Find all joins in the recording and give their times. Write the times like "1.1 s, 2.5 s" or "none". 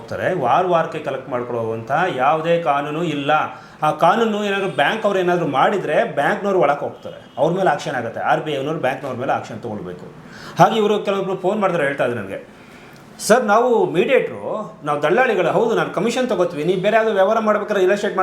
none